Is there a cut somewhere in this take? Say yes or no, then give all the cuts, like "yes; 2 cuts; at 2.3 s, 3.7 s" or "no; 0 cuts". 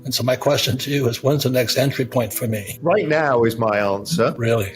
yes; 1 cut; at 2.7 s